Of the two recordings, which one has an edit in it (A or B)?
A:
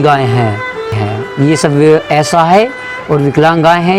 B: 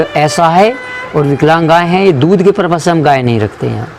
A